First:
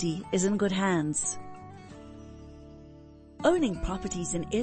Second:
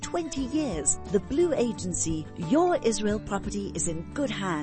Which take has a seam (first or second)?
first